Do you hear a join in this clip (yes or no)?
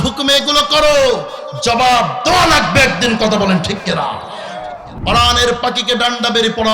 yes